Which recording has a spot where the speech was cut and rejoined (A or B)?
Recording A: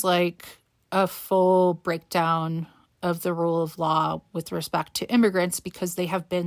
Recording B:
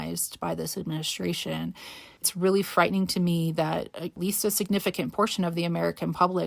B